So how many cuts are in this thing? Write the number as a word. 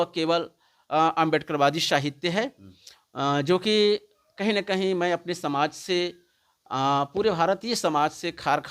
zero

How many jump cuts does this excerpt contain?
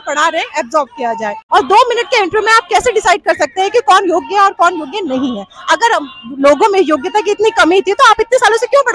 one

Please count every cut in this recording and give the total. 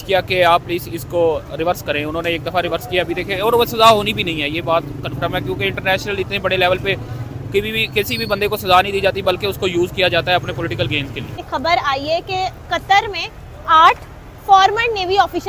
one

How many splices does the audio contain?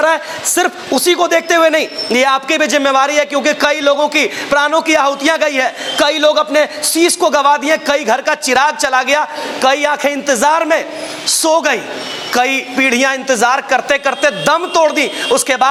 zero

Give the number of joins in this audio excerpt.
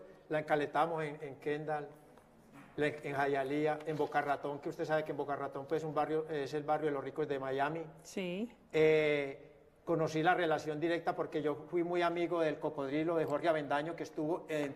one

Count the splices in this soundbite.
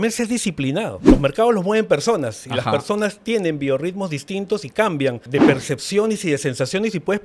two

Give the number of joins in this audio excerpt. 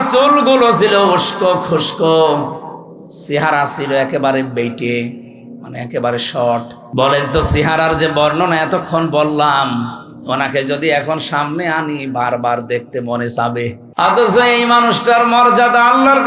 two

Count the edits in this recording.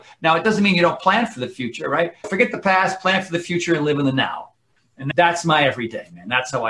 one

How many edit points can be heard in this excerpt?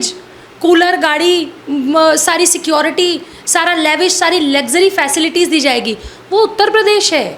zero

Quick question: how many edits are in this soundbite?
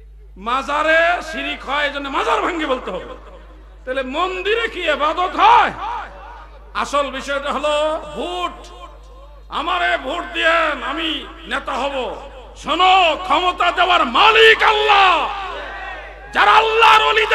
zero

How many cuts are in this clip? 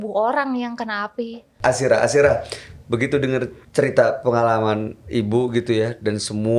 one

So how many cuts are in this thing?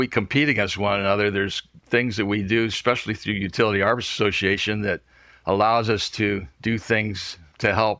one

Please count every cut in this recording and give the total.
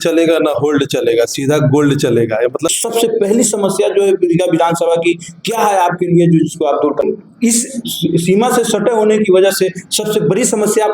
two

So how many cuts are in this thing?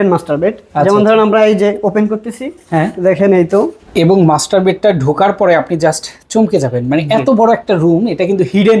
one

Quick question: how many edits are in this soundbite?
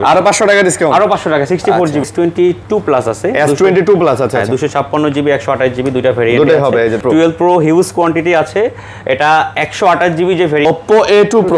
three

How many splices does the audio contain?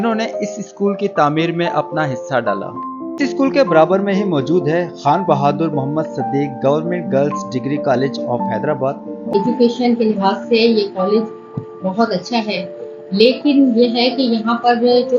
two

